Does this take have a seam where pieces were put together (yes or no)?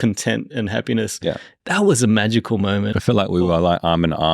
yes